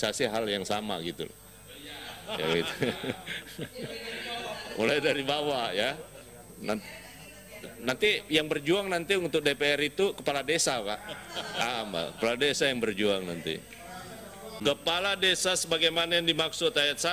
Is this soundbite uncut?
no; 1 cut; at 14.5 s

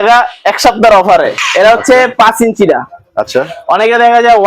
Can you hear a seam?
yes; 1 cut; at 1.4 s

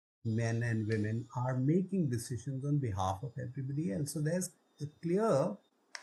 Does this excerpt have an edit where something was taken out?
no; 0 cuts

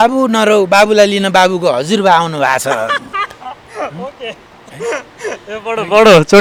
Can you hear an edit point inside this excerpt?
no; 0 cuts

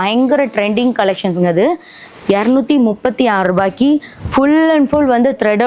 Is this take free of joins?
yes; 0 cuts

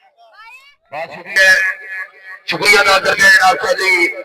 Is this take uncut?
no; 1 cut; at 1.3 s

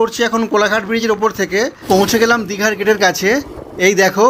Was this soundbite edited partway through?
yes; 1 cut; at 1.8 s

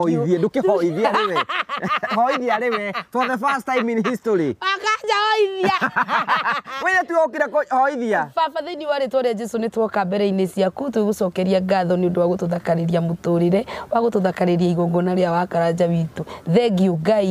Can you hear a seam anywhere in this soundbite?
no; 0 cuts

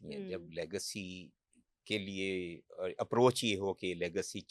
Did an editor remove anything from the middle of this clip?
no; 0 cuts

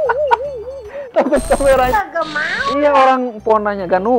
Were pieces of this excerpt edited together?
yes; 1 cut; at 1.9 s

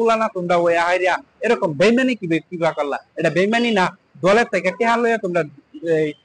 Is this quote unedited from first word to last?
yes; 0 cuts

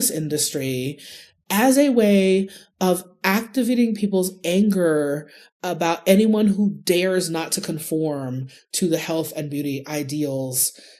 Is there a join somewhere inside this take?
no; 0 cuts

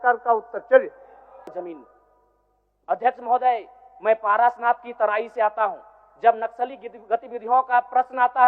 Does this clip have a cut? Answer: yes; 1 cut; at 1.5 s

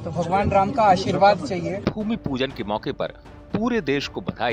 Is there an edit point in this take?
yes; 1 cut; at 1.8 s

